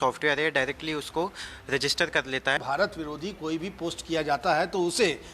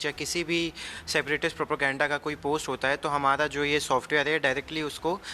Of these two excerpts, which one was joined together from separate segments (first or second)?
first